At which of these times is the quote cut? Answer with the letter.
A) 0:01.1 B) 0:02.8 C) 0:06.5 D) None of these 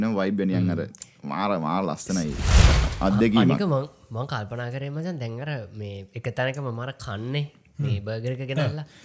B